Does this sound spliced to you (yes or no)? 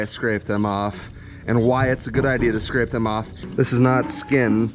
yes